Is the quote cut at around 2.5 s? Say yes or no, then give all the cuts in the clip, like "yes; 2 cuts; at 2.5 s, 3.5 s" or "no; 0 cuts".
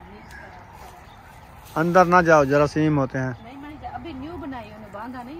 no; 1 cut; at 3.7 s